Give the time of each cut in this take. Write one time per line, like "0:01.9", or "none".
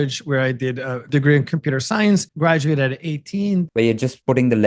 0:01.0
0:02.3
0:03.9